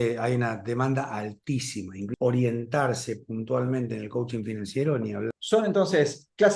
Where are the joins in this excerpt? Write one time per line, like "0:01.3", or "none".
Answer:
0:02.1
0:05.4

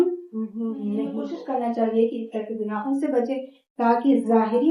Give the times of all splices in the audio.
0:01.3

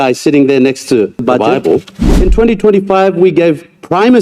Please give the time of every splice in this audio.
0:02.0

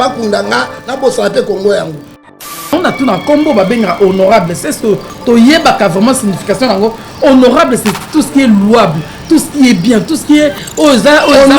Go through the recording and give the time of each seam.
0:02.6

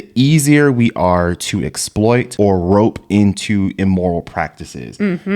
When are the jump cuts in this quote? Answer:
0:02.3

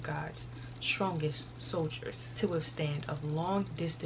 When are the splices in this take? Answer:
0:02.2

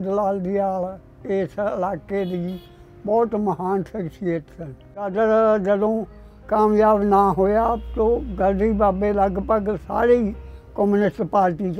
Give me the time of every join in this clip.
0:05.1

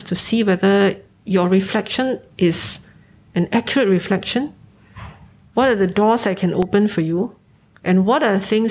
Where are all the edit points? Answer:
none

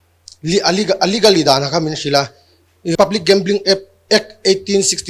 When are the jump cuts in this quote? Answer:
0:03.0

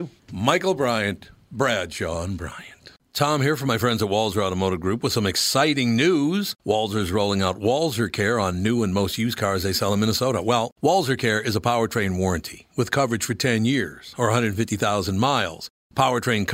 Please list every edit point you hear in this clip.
0:03.0

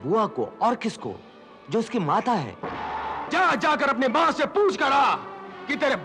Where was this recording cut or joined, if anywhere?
0:03.2

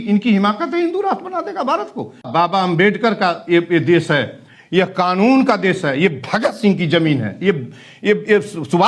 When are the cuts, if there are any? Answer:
0:02.3

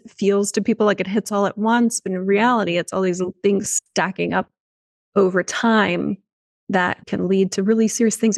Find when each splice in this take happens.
0:07.0

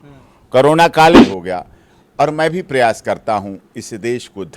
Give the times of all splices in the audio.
0:01.2

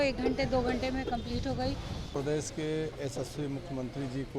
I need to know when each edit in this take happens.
0:02.1

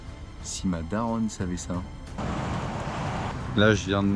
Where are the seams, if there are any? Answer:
0:02.0
0:03.3

